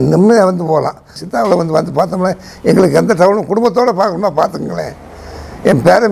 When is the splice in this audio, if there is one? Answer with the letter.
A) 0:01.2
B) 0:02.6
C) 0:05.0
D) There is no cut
A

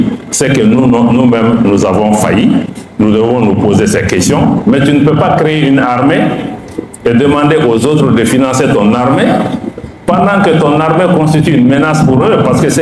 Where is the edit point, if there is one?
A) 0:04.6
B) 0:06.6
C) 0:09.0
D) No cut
A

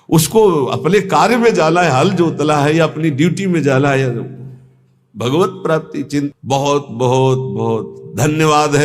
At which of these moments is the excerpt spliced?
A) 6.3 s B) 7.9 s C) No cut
A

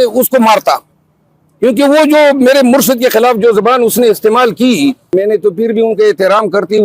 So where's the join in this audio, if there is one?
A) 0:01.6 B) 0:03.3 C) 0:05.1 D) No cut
C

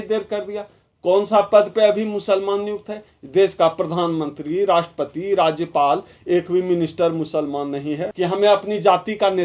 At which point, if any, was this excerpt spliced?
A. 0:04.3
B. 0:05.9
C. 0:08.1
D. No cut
C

